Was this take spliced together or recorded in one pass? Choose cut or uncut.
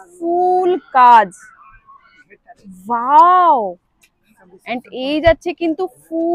uncut